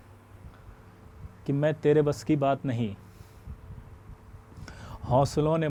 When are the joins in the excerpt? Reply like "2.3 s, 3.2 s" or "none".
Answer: none